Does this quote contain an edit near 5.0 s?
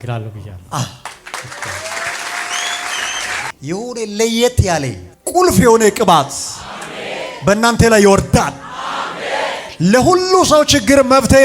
no; 1 cut; at 3.4 s

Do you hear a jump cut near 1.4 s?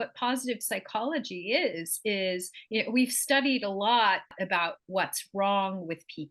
no; 1 cut; at 4.3 s

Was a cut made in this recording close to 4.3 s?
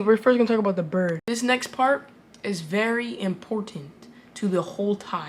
no; 1 cut; at 1.2 s

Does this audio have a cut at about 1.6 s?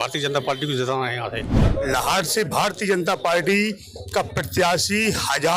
yes; 1 cut; at 1.6 s

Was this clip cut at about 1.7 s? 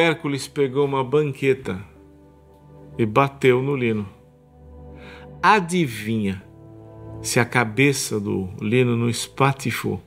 no; 0 cuts

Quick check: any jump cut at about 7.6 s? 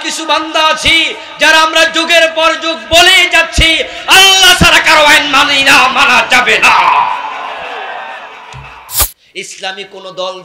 no; 1 cut; at 9.0 s

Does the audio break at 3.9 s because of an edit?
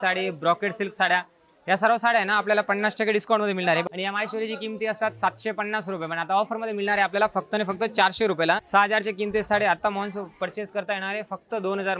yes; 2 cuts; at 3.9 s, 8.6 s

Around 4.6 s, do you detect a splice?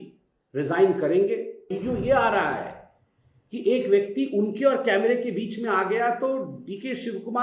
no; 1 cut; at 1.7 s

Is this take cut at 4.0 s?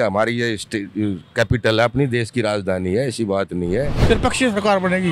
yes; 1 cut; at 4.0 s

